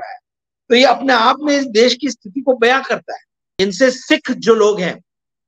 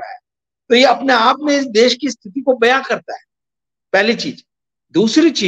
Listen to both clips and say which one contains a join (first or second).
first